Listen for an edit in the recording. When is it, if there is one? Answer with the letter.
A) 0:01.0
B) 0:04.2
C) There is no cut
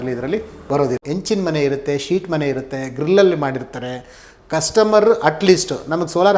A